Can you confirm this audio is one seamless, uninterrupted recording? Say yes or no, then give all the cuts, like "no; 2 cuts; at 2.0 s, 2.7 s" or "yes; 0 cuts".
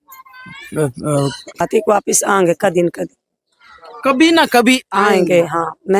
no; 1 cut; at 1.6 s